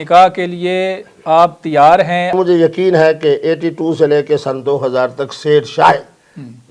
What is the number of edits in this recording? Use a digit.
1